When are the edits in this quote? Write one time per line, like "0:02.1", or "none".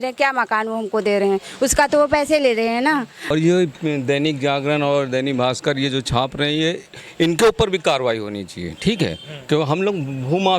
0:03.3